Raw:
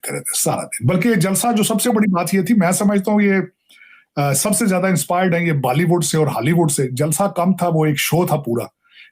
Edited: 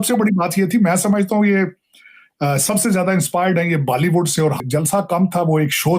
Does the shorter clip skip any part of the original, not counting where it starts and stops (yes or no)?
yes